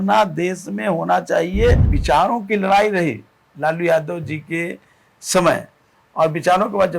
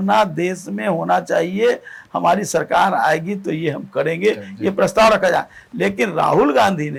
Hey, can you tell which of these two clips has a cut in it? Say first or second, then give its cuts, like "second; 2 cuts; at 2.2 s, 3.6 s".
first; 1 cut; at 1.9 s